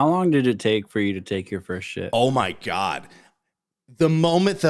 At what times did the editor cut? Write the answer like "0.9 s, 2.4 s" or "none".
none